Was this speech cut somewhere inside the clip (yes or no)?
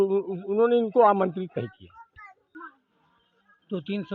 yes